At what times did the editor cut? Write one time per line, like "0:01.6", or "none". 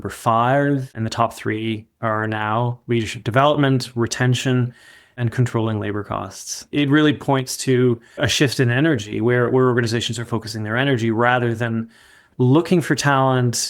0:00.9
0:06.5
0:08.3